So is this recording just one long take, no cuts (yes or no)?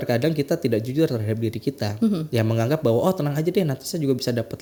yes